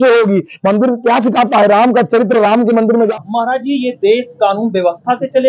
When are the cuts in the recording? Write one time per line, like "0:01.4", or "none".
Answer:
0:03.0